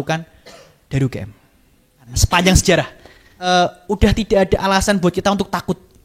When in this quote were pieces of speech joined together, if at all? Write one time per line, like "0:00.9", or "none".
0:02.1
0:03.4